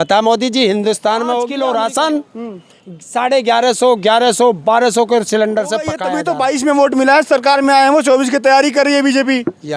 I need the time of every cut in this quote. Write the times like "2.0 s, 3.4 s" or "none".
1.5 s, 6.0 s

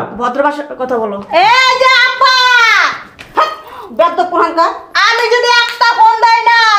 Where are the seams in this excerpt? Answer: none

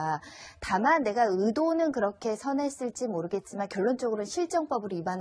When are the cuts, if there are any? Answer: none

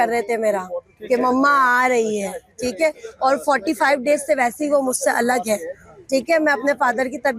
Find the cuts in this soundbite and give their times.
none

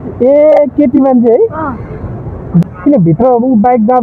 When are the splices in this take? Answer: 2.6 s

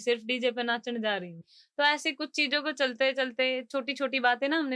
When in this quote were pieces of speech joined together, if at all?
1.4 s

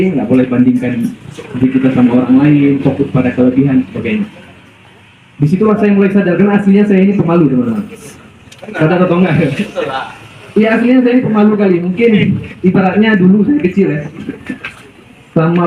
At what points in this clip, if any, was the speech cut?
none

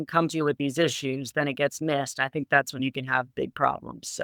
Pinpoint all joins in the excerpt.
none

